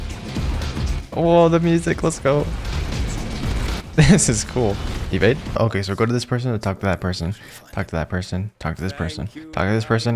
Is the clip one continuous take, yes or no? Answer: no